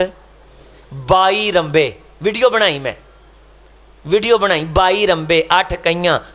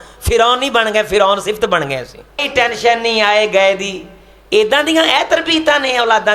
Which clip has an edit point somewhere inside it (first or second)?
second